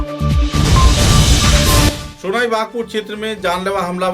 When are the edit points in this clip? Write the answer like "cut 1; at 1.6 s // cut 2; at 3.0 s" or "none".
cut 1; at 2.0 s